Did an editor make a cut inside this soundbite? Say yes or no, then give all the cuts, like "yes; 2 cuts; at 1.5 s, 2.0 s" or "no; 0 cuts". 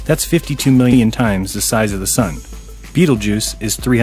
no; 0 cuts